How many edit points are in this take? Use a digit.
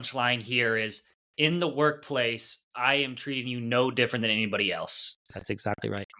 0